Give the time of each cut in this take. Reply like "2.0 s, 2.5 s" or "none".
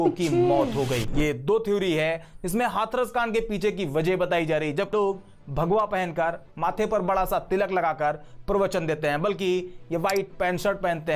4.9 s